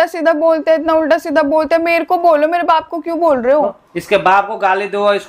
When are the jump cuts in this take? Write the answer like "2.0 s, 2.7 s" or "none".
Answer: none